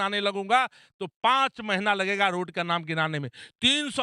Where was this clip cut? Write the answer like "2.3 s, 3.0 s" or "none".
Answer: none